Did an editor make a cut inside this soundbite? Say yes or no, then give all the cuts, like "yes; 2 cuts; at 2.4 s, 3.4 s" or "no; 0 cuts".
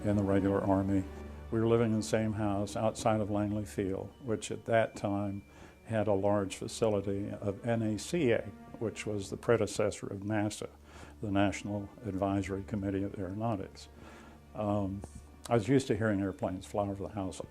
yes; 1 cut; at 8.4 s